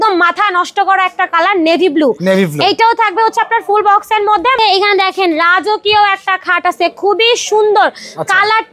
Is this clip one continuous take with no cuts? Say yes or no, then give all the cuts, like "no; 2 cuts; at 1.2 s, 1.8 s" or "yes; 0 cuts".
no; 1 cut; at 4.6 s